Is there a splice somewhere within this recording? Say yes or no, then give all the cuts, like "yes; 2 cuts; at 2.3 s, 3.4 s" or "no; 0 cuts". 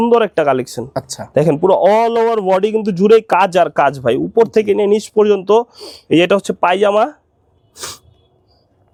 no; 0 cuts